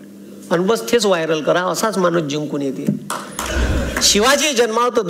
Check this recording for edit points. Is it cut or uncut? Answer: cut